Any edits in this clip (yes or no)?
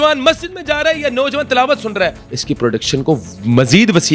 yes